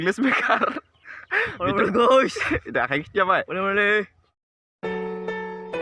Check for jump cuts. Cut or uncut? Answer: cut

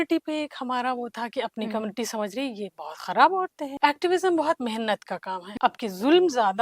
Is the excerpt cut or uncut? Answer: cut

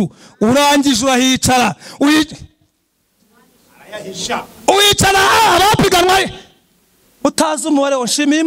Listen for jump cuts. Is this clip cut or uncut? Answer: uncut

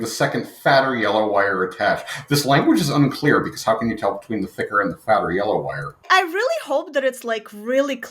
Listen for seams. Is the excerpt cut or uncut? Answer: cut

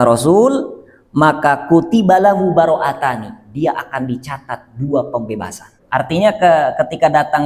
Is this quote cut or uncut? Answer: cut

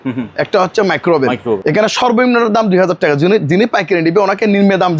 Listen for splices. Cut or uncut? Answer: cut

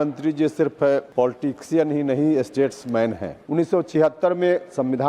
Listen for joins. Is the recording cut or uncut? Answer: cut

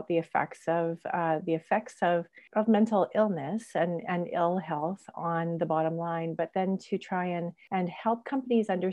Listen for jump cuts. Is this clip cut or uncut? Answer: cut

